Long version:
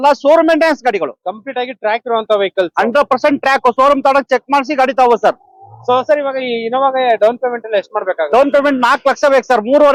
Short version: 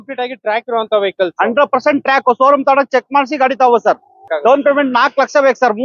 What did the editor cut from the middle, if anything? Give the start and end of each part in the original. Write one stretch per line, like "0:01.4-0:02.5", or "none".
0:05.7-0:08.2